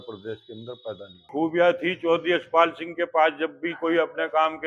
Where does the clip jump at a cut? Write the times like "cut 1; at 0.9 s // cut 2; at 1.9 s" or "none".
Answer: cut 1; at 1.3 s

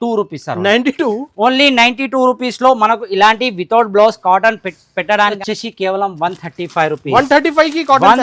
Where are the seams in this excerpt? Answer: cut 1; at 5.4 s

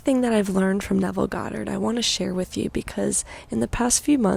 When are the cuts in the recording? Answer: none

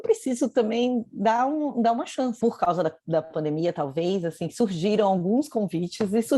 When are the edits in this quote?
cut 1; at 2.3 s

